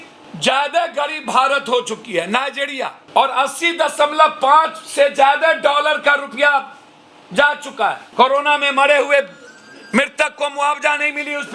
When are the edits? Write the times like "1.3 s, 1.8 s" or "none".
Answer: 8.0 s